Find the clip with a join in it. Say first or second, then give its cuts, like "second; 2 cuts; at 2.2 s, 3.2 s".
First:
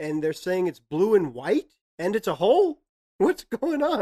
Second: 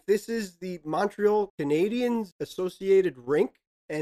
first; 1 cut; at 2.9 s